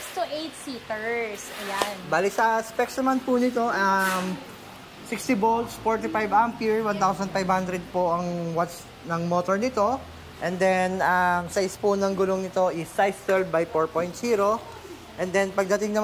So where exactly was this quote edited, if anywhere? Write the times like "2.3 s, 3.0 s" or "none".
none